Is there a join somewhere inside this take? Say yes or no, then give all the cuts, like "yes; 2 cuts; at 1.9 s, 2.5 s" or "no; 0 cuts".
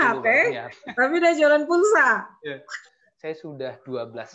yes; 1 cut; at 2.7 s